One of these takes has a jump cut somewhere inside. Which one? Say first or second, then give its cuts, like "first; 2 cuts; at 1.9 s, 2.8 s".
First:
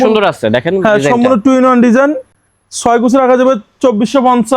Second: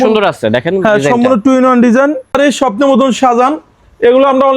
second; 1 cut; at 2.3 s